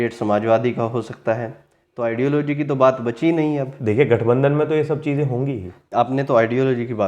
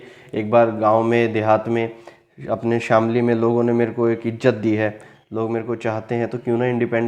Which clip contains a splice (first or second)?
first